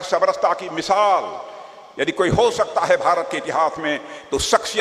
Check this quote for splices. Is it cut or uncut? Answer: uncut